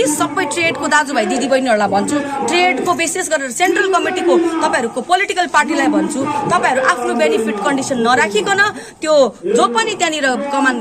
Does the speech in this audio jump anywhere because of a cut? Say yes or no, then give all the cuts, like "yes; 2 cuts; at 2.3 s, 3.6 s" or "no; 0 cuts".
no; 0 cuts